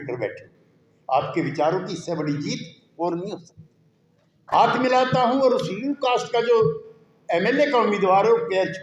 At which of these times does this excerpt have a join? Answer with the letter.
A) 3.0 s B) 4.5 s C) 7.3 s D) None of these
B